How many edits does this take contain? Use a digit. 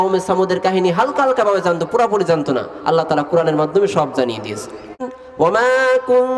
1